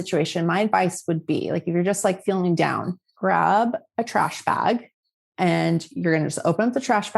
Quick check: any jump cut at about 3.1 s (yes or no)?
yes